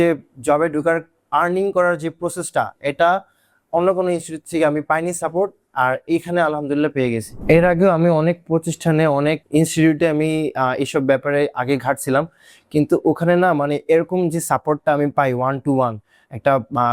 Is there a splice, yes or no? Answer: yes